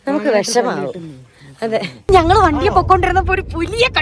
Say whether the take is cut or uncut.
cut